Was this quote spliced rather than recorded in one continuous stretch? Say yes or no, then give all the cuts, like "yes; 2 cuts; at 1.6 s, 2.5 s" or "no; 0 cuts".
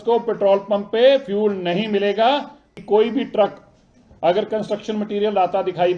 yes; 1 cut; at 2.7 s